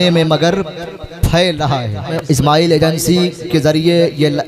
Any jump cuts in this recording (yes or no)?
yes